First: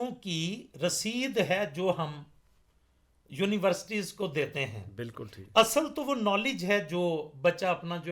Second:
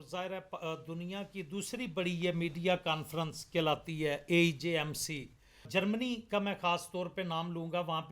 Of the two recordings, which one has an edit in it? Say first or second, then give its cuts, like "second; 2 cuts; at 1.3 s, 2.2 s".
second; 1 cut; at 5.6 s